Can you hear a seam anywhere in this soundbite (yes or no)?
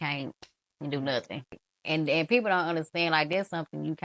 yes